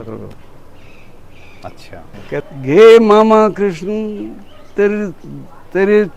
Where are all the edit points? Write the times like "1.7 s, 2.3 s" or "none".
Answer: 2.4 s